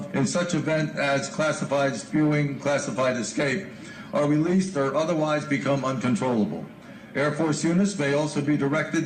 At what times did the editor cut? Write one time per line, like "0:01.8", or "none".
0:07.9